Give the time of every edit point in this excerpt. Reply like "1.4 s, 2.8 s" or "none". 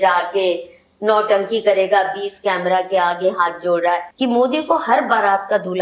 4.1 s